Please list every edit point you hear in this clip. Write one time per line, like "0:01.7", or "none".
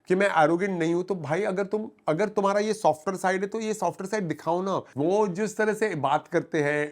0:04.9